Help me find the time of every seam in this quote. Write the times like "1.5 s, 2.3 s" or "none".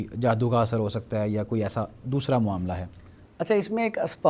none